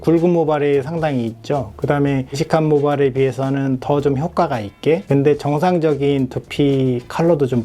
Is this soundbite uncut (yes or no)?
yes